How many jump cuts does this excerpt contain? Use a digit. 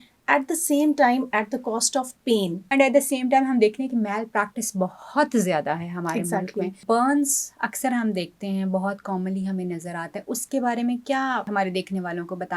3